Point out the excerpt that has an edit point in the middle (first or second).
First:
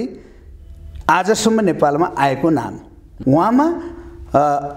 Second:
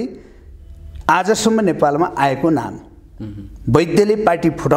first